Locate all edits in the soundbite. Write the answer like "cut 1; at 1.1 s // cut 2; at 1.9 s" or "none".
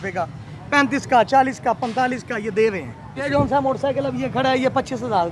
cut 1; at 3.3 s